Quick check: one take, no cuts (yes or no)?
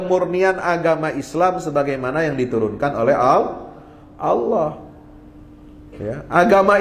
yes